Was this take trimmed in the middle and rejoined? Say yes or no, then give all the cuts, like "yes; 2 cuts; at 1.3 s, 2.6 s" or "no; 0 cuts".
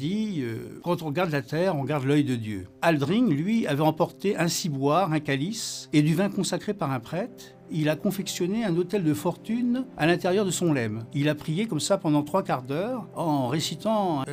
no; 0 cuts